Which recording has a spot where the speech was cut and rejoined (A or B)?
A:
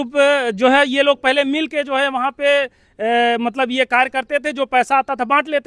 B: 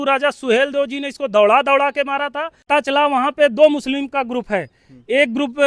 B